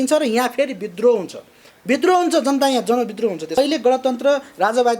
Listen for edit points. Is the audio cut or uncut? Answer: cut